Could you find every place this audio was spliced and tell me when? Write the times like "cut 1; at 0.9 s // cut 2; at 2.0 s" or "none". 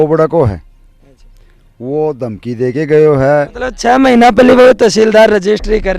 cut 1; at 3.6 s

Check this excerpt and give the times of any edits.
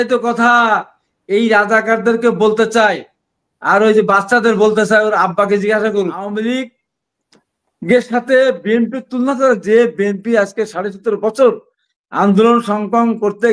cut 1; at 6.2 s

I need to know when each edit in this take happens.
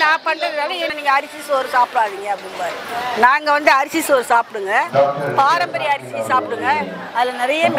cut 1; at 0.9 s

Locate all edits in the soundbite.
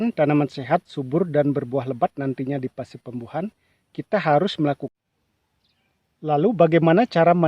cut 1; at 4.9 s

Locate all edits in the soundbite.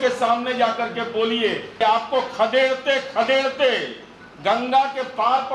cut 1; at 1.7 s

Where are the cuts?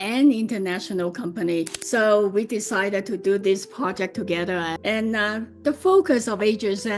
cut 1; at 1.8 s // cut 2; at 4.7 s

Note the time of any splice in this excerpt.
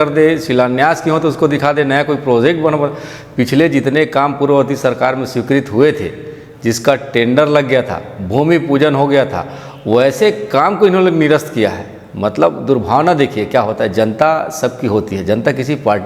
none

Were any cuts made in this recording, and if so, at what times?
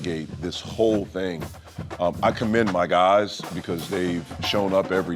none

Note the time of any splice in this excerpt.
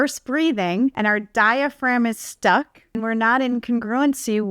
cut 1; at 0.9 s // cut 2; at 2.8 s

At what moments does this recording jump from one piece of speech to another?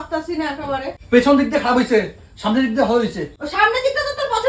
cut 1; at 0.9 s // cut 2; at 3.3 s

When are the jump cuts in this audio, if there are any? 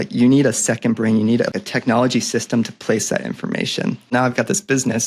cut 1; at 1.6 s // cut 2; at 4.1 s

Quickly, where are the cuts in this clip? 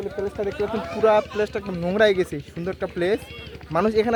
none

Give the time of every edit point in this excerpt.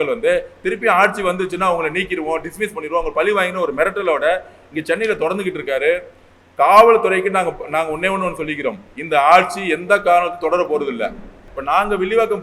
cut 1; at 11.4 s

